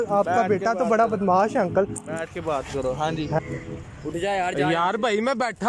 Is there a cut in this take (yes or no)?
yes